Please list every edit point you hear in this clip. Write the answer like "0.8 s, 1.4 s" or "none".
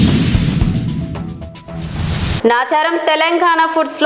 2.4 s